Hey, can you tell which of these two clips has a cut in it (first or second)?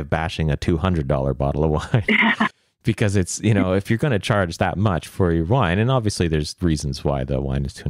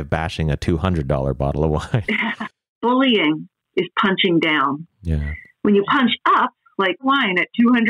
second